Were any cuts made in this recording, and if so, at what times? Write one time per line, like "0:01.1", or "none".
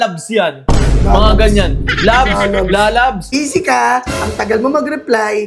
0:03.3